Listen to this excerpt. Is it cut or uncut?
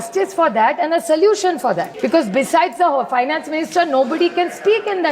cut